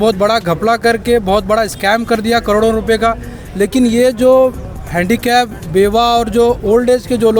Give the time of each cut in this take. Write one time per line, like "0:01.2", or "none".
none